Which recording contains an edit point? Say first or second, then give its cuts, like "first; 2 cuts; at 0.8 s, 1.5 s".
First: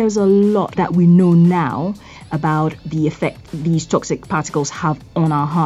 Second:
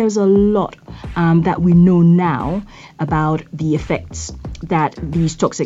first; 2 cuts; at 0.8 s, 3.5 s